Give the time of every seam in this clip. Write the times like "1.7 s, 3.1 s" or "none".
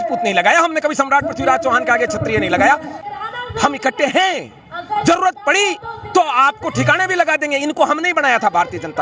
3.1 s

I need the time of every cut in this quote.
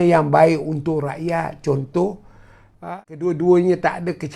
2.8 s

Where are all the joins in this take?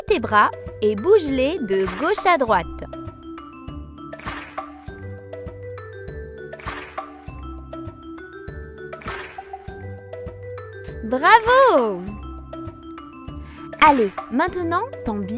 9.3 s, 11.0 s

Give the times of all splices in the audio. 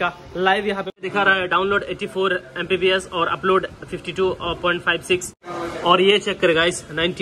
0.9 s, 5.4 s

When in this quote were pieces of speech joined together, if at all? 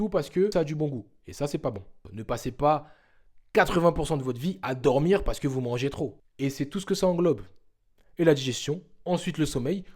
2.0 s, 6.2 s

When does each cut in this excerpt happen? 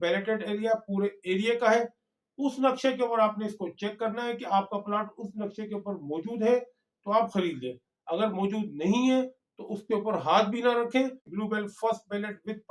11.3 s

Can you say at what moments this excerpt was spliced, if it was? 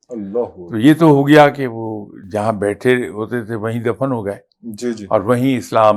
none

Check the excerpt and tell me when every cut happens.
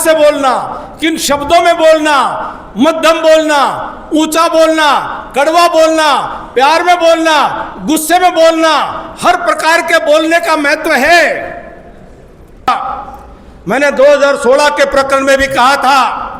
12.7 s

